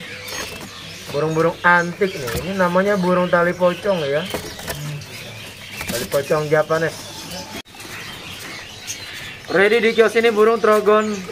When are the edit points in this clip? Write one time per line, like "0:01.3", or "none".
0:07.6